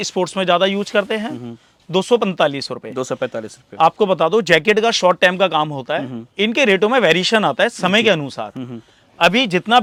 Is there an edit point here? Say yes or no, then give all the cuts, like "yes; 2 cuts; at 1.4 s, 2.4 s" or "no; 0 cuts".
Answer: no; 0 cuts